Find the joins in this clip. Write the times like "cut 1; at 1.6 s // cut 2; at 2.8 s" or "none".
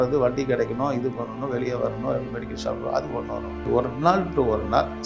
cut 1; at 3.7 s